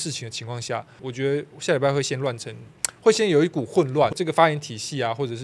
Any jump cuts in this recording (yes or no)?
yes